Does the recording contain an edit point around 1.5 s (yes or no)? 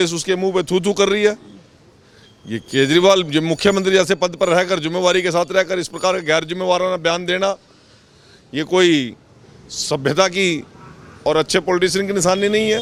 no